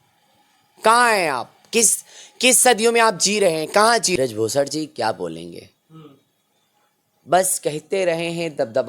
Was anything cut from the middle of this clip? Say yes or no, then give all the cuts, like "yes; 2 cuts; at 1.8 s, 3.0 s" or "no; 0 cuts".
yes; 1 cut; at 4.1 s